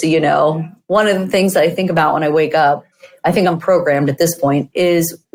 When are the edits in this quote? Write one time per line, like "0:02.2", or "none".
none